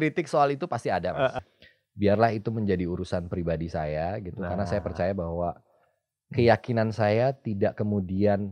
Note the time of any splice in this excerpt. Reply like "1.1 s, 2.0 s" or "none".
1.3 s